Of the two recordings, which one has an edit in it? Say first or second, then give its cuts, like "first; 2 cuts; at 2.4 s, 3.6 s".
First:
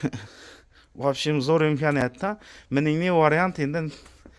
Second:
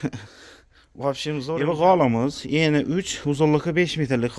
second; 1 cut; at 1.5 s